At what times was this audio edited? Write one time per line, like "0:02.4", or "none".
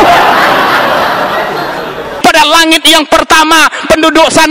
0:02.1